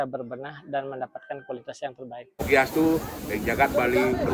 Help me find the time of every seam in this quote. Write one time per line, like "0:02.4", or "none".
0:02.4